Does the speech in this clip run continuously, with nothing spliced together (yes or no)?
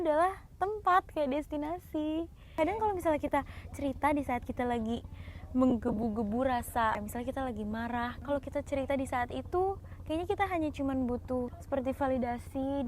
no